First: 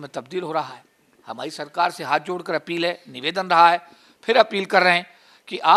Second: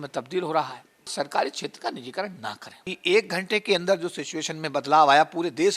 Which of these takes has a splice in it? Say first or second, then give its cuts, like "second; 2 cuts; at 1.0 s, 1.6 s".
second; 2 cuts; at 1.1 s, 2.9 s